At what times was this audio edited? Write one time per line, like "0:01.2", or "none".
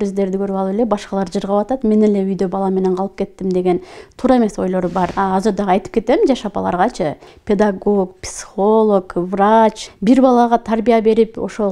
0:05.1
0:07.3
0:09.9